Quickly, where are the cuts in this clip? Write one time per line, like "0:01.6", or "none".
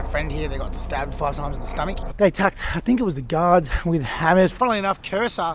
0:02.0
0:04.5

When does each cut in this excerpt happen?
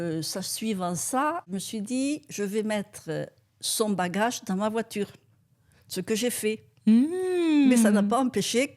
0:01.5

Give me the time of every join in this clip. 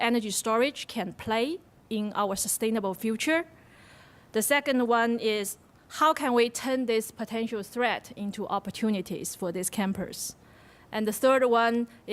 0:11.2

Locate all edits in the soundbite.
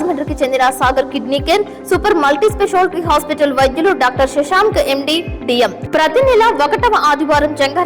0:05.8

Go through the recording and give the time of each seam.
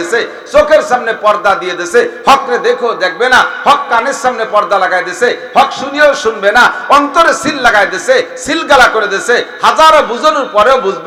none

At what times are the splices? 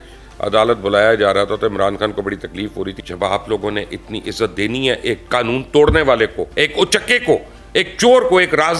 0:02.9
0:06.4

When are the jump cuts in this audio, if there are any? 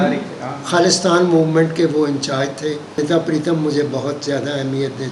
0:03.0

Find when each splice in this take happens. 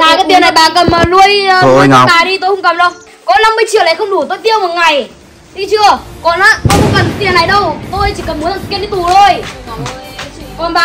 0:03.1

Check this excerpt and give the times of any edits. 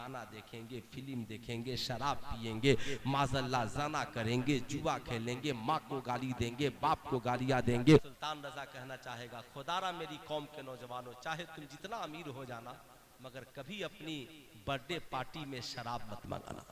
0:08.1

